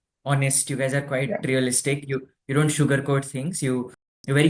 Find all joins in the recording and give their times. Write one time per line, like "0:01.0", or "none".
none